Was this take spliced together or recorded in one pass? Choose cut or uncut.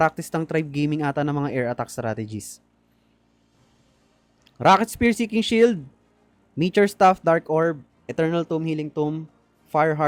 uncut